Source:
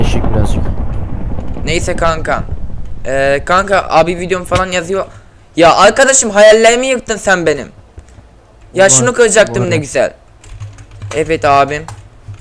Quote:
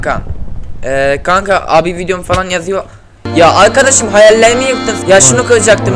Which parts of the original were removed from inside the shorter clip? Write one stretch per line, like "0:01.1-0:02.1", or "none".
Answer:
0:07.1-0:08.6